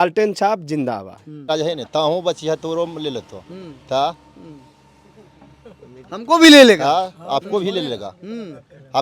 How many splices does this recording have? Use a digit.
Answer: 1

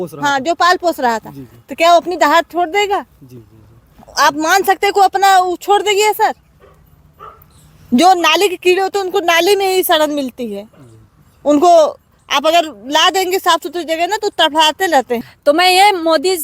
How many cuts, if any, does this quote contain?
1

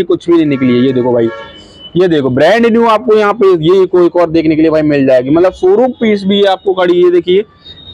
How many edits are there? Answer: 0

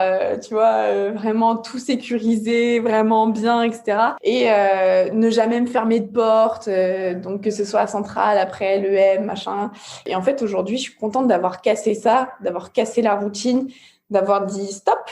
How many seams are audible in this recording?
2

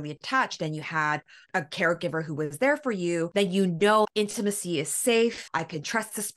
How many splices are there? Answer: 3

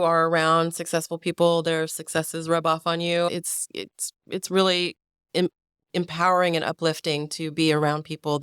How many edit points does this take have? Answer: 0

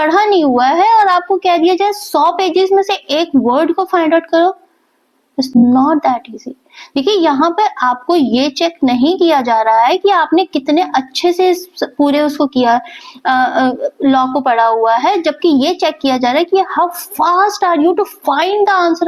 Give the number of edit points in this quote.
0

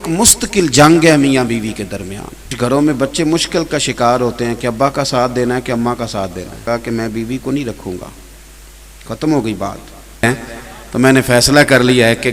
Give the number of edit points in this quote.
3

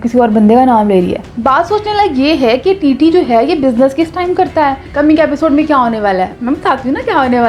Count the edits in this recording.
2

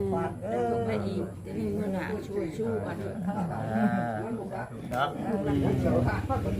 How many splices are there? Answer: 1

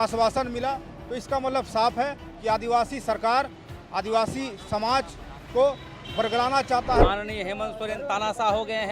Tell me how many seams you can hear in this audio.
1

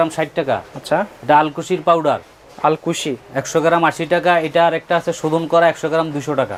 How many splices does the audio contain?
0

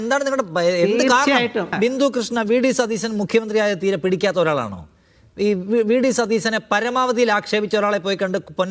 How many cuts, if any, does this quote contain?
1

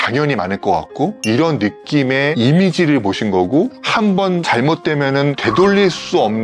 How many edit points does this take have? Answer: 4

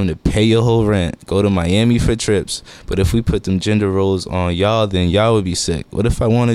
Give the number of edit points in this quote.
0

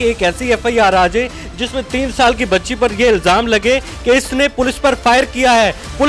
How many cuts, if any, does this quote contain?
0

